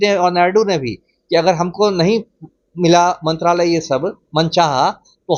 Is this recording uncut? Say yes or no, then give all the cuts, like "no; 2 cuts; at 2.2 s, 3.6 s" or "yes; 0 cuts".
yes; 0 cuts